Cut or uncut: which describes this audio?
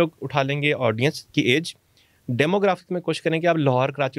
uncut